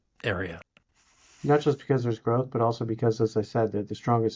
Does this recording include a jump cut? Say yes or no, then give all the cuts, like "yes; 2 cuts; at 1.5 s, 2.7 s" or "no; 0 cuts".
no; 0 cuts